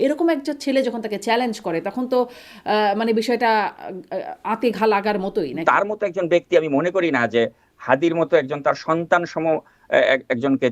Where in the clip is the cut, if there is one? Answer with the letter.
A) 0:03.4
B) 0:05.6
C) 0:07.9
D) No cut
B